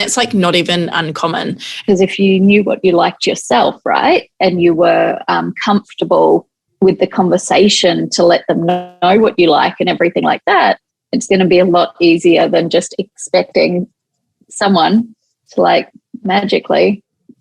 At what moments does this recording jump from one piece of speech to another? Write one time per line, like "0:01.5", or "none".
0:01.8
0:06.6